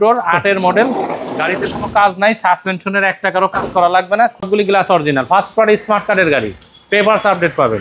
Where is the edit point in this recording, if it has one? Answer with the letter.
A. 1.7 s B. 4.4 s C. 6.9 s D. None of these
B